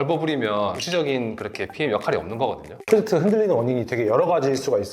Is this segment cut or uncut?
cut